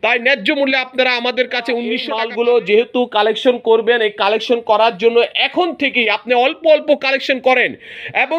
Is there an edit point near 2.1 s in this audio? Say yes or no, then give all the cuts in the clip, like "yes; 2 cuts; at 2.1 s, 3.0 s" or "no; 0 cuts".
yes; 1 cut; at 2.1 s